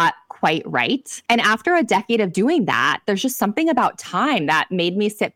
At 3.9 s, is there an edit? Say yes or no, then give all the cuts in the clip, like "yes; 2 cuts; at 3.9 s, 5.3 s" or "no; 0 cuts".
no; 2 cuts; at 1.1 s, 2.3 s